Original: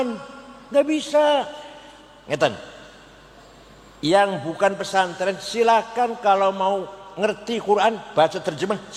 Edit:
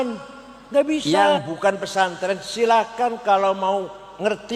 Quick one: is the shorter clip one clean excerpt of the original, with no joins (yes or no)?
no